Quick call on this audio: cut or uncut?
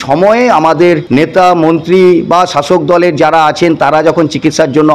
cut